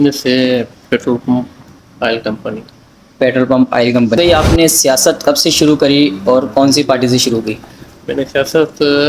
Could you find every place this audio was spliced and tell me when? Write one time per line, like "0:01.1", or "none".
0:04.2